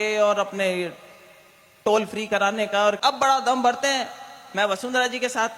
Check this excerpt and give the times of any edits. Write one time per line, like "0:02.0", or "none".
0:03.0

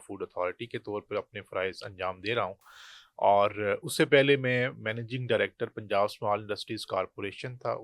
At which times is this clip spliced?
none

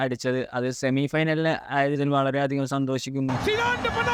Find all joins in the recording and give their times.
none

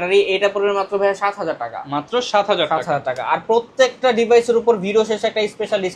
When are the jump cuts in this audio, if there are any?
none

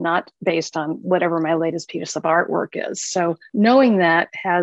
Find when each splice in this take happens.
0:03.4

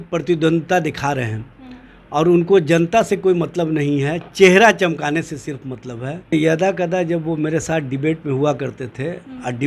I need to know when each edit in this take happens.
0:06.3

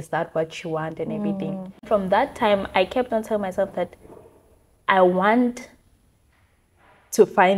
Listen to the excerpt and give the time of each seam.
0:01.9

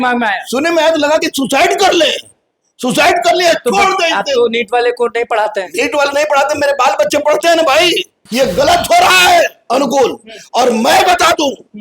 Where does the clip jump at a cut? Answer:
0:08.2

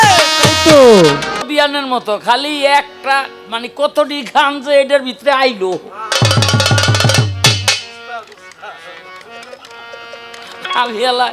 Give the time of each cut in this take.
0:01.5

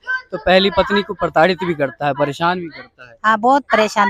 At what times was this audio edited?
none

